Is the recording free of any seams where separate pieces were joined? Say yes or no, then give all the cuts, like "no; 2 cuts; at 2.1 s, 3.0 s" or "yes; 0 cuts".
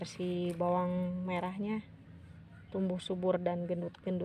yes; 0 cuts